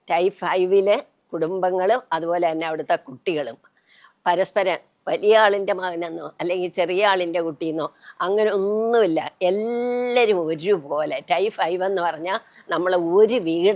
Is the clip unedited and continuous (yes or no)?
yes